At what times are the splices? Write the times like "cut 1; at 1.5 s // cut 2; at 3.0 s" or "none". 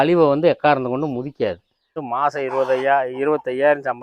cut 1; at 2.0 s